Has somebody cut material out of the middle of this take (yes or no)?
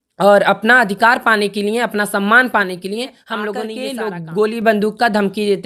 yes